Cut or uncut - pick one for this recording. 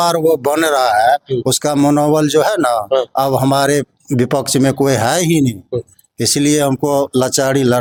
uncut